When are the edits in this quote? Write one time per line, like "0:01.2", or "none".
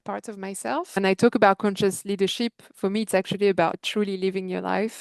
0:01.0
0:03.8